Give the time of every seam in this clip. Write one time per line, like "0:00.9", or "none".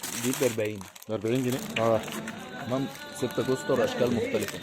0:01.6